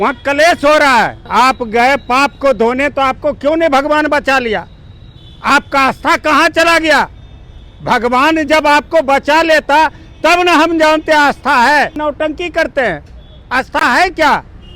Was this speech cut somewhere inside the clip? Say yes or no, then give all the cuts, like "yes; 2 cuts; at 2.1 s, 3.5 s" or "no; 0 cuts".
yes; 2 cuts; at 1.2 s, 12.0 s